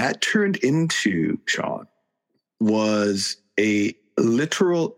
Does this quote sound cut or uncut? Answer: uncut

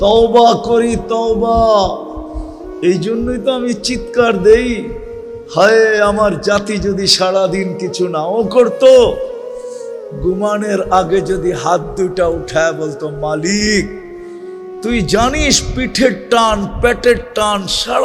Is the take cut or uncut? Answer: uncut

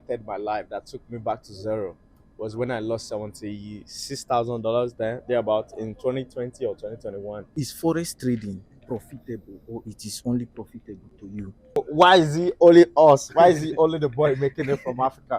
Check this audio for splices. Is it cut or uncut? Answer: cut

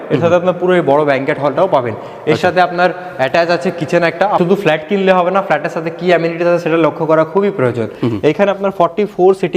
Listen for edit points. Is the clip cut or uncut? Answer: cut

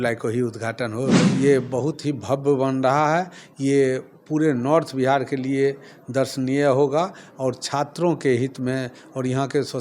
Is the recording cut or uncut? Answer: cut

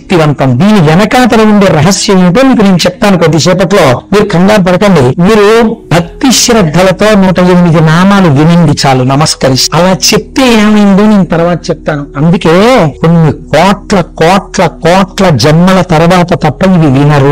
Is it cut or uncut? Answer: cut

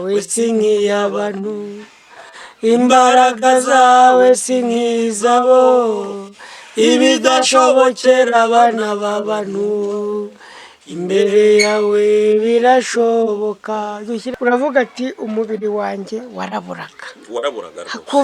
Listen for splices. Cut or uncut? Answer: cut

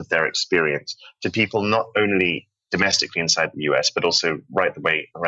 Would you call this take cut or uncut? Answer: uncut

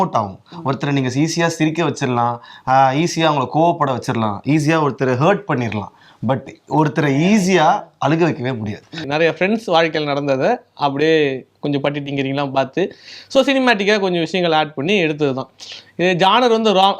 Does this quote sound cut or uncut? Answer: cut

